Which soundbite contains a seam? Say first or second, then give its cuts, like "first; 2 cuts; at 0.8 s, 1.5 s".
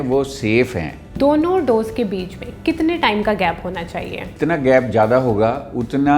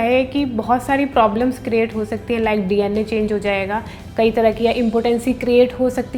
first; 2 cuts; at 1.1 s, 4.3 s